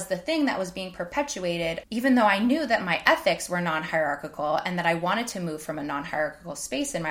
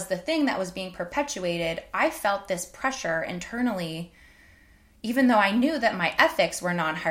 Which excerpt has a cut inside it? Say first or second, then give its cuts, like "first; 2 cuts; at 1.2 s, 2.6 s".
first; 1 cut; at 1.8 s